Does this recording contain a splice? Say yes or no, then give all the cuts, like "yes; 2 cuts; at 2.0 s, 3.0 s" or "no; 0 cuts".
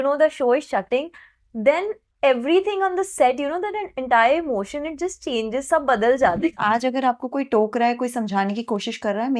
yes; 1 cut; at 6.5 s